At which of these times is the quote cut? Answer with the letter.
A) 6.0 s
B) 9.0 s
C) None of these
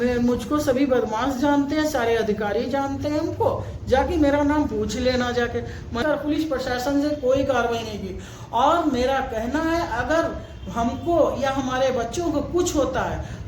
A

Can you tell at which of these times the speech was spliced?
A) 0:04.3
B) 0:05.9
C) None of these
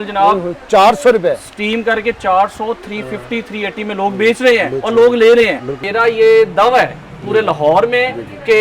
B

